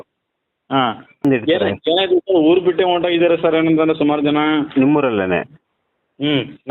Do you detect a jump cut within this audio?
yes; 1 cut; at 1.1 s

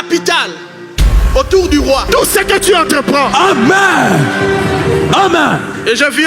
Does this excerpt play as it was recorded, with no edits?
no; 1 cut; at 2.1 s

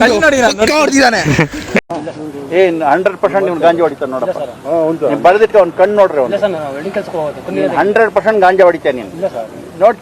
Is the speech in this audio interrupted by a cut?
no; 0 cuts

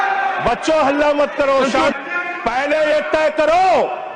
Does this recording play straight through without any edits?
no; 1 cut; at 1.9 s

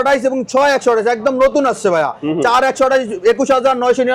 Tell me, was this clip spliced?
no; 0 cuts

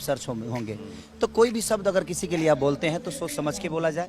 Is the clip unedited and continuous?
yes; 0 cuts

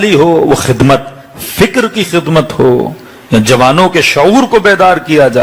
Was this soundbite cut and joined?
no; 0 cuts

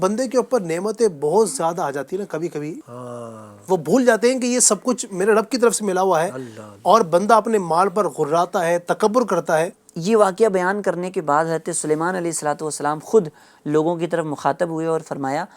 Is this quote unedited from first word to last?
no; 2 cuts; at 2.8 s, 9.9 s

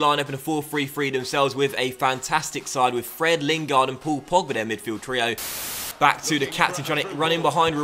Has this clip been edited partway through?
yes; 1 cut; at 5.6 s

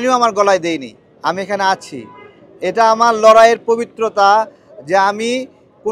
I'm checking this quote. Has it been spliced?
no; 0 cuts

